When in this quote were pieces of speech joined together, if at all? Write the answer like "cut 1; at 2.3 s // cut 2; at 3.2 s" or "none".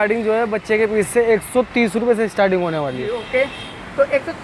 none